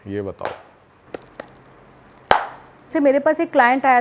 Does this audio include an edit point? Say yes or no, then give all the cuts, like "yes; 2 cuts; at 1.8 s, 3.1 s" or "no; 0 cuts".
yes; 1 cut; at 2.9 s